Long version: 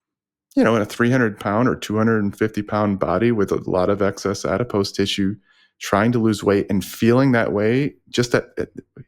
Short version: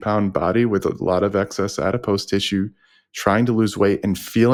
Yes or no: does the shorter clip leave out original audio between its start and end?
no